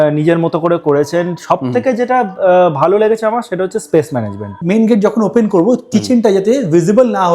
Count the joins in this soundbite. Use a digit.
1